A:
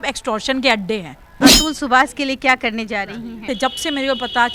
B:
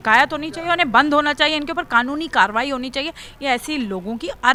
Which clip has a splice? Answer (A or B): A